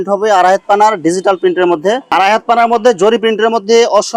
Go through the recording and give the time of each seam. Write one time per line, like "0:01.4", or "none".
0:02.0